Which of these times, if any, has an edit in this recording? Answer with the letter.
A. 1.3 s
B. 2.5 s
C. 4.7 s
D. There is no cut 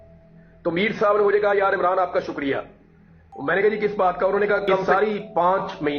C